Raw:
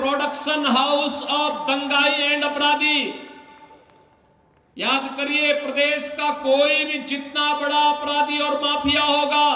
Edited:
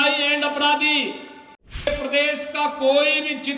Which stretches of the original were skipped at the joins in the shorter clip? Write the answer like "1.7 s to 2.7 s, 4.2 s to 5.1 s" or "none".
3.9 s to 5.5 s